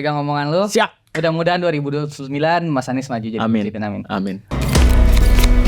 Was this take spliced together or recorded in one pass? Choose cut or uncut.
cut